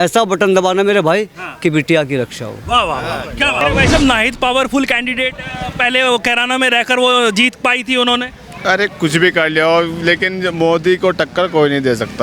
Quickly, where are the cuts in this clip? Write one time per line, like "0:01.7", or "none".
0:03.6